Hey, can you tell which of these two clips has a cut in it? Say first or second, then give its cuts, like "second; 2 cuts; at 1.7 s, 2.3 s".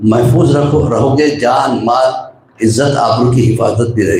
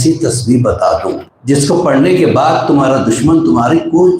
second; 1 cut; at 1.3 s